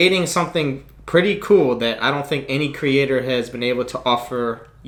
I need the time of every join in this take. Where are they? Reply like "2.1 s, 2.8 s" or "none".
none